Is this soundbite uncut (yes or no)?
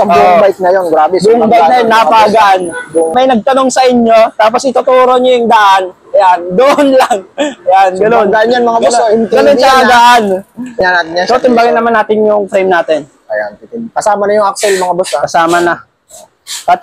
no